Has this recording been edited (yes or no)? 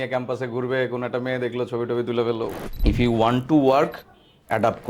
yes